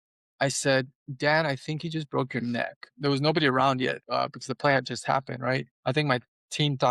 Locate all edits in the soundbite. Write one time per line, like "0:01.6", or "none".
0:02.9
0:04.0
0:05.7